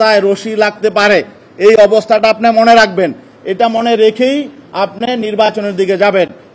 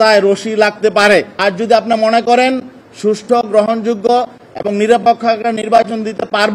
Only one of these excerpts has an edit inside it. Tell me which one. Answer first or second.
second